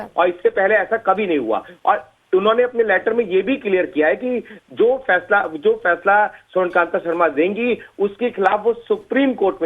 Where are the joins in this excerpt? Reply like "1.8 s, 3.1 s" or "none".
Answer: 1.7 s

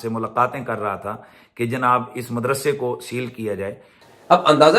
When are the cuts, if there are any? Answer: none

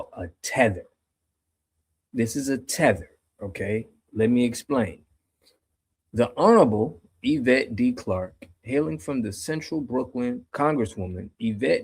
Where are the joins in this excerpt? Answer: 10.5 s

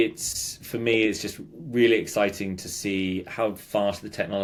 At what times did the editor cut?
none

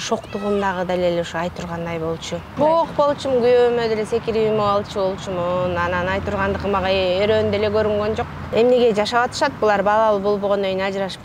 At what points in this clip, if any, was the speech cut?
2.5 s, 8.4 s

